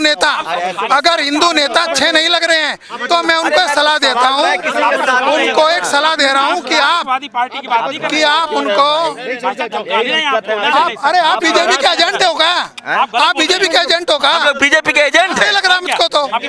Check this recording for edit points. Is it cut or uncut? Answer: uncut